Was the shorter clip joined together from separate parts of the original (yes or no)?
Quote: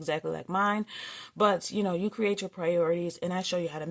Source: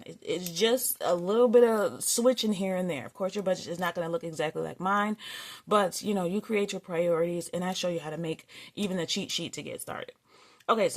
no